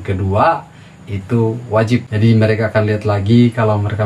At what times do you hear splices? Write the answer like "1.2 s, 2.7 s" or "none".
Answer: 2.1 s